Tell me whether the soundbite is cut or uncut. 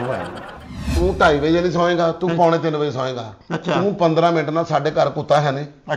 cut